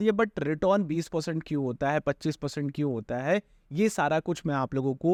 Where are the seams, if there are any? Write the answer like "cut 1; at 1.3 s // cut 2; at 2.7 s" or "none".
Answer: none